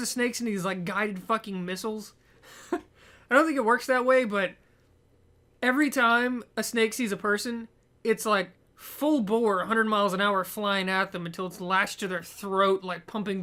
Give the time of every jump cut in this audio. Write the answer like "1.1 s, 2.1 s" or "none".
none